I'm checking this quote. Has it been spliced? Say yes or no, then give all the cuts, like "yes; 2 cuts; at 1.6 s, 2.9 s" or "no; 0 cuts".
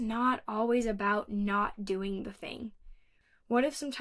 yes; 1 cut; at 3.0 s